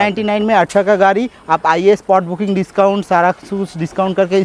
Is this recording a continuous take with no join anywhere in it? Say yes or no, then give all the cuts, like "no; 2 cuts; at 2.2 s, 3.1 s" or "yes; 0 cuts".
yes; 0 cuts